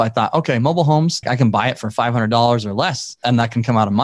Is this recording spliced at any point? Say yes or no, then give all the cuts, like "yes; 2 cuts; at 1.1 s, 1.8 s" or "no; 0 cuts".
yes; 2 cuts; at 1.2 s, 3.1 s